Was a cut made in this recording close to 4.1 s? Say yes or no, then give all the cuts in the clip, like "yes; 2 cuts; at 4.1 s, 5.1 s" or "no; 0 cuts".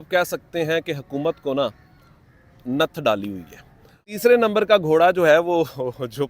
yes; 1 cut; at 4.1 s